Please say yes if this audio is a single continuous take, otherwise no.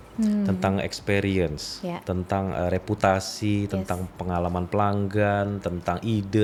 yes